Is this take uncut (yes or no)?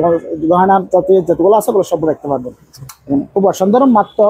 yes